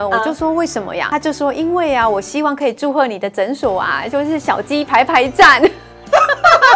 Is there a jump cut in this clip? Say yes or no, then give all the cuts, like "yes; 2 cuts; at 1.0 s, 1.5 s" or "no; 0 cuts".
yes; 1 cut; at 1.1 s